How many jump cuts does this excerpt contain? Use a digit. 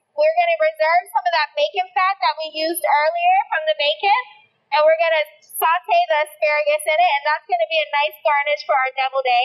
0